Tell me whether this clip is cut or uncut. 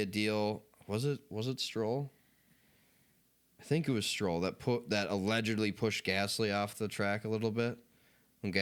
uncut